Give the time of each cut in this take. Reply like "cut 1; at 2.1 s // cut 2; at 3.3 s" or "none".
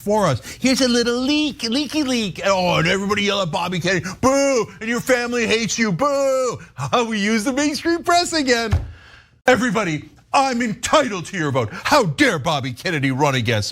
cut 1; at 9.5 s